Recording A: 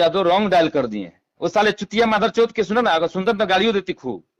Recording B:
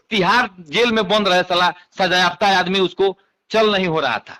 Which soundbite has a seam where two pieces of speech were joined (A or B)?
A